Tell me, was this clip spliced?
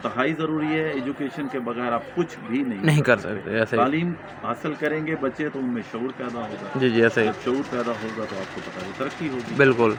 no; 0 cuts

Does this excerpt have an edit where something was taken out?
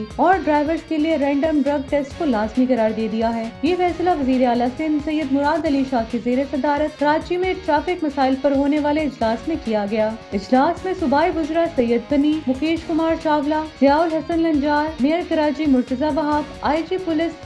no; 0 cuts

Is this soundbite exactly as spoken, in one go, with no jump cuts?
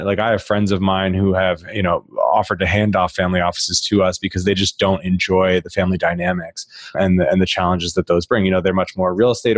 yes; 0 cuts

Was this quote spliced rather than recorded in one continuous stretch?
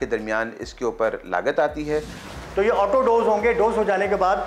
yes; 1 cut; at 2.2 s

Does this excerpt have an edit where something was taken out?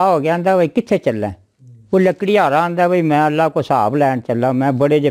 no; 0 cuts

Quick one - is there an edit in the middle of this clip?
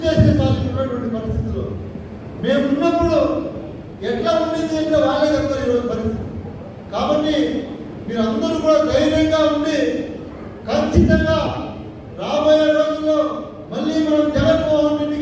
no; 0 cuts

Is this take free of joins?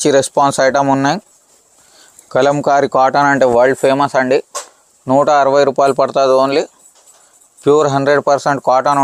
yes; 0 cuts

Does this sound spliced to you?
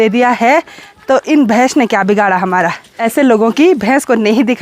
yes; 1 cut; at 3.0 s

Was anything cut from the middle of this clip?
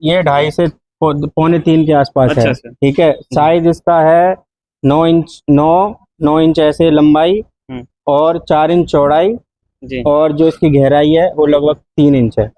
no; 0 cuts

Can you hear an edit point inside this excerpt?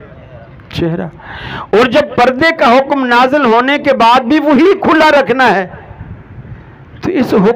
no; 0 cuts

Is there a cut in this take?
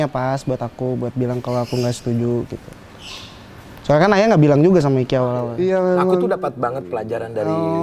yes; 1 cut; at 5.5 s

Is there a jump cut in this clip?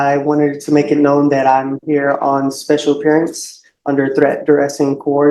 no; 0 cuts

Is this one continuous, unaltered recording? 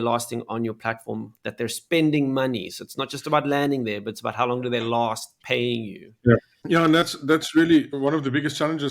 no; 2 cuts; at 6.5 s, 7.9 s

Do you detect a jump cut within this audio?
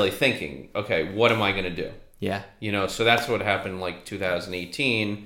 no; 0 cuts

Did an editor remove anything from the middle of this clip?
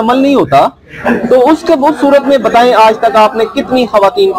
no; 0 cuts

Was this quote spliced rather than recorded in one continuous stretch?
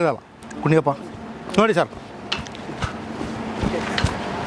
no; 0 cuts

